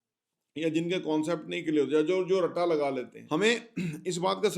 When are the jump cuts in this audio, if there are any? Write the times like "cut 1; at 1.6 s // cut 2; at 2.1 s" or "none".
cut 1; at 3.2 s